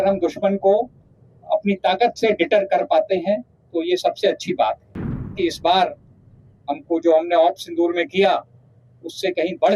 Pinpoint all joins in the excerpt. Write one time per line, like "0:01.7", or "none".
0:05.4

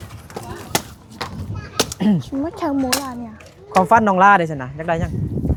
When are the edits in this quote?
none

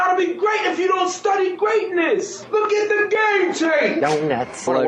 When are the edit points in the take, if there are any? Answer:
none

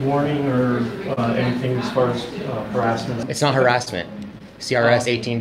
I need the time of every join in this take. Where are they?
0:01.1
0:03.2

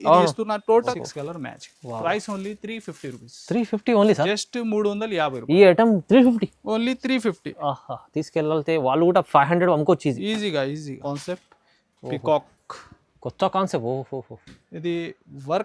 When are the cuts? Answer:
0:00.9
0:11.0

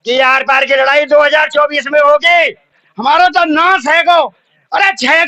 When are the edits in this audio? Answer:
0:02.8

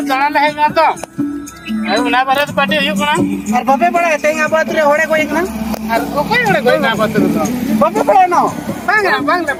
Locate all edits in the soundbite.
none

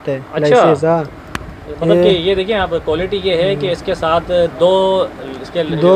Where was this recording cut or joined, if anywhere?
none

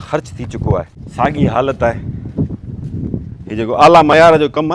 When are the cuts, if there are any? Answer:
0:01.0

